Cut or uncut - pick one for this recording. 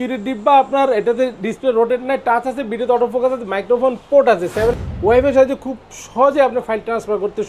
cut